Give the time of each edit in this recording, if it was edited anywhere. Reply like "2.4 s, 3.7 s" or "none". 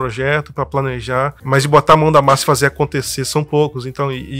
1.4 s